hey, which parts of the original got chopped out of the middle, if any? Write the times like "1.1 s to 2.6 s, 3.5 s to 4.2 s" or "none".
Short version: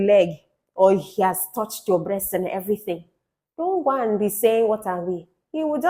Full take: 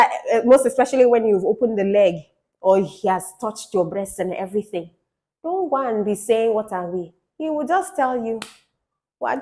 none